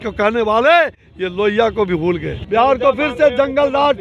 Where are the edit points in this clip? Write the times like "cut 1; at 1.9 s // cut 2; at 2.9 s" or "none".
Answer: cut 1; at 2.3 s